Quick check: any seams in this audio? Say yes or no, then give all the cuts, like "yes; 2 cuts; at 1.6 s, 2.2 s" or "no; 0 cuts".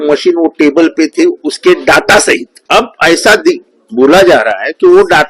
yes; 1 cut; at 2.5 s